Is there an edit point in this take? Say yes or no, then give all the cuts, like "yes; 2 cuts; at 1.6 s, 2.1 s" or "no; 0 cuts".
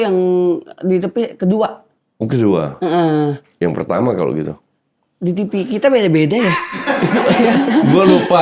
no; 0 cuts